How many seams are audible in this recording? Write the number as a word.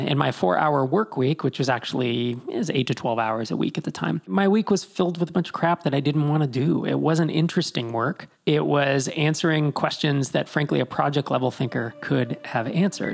one